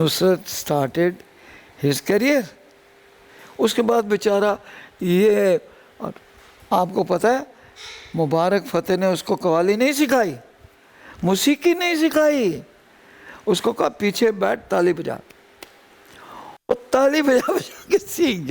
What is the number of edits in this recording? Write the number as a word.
zero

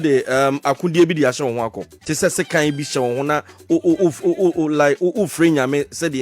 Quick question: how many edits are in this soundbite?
one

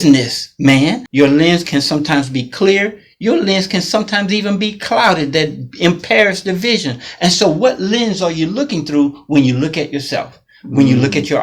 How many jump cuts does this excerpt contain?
one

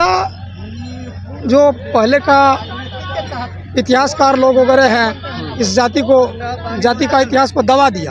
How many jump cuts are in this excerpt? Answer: zero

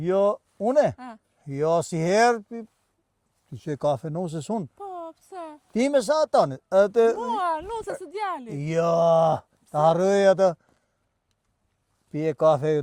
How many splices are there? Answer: zero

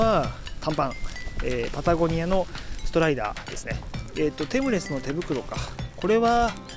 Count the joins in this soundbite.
one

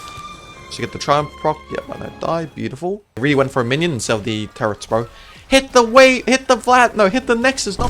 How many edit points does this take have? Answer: one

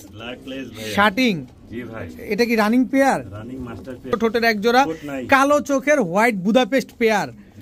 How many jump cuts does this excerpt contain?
one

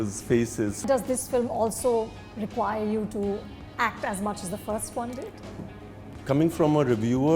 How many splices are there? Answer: two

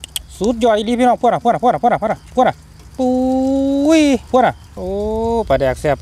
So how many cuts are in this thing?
one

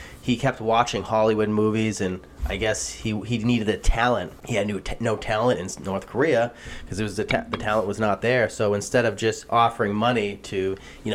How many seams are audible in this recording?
one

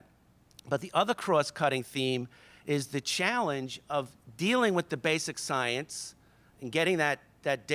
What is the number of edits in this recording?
one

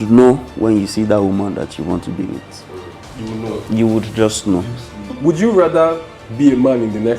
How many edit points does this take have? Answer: one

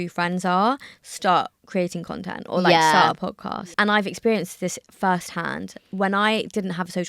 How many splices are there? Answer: one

